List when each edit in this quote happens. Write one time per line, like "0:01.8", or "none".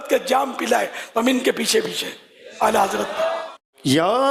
none